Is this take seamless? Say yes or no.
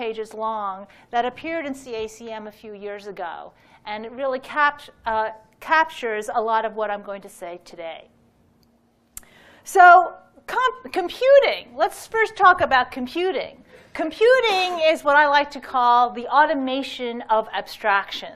yes